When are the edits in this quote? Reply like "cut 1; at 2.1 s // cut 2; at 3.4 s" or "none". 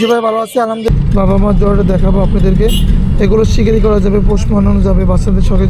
cut 1; at 0.9 s